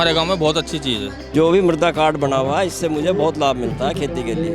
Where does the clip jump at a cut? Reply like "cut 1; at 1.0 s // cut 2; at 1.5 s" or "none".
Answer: cut 1; at 1.3 s